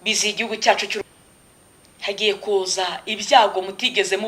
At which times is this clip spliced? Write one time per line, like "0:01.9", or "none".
0:01.0